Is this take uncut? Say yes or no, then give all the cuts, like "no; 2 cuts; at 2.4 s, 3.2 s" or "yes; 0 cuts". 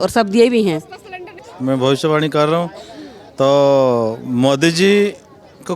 no; 1 cut; at 1.4 s